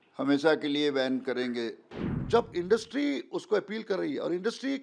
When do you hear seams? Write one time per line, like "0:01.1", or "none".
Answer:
0:01.9